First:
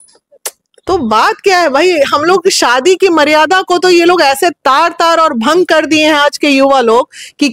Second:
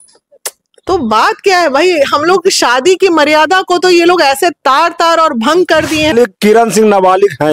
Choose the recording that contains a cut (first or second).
second